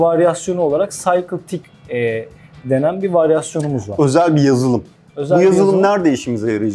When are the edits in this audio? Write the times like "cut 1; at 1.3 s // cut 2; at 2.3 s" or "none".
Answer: cut 1; at 5.0 s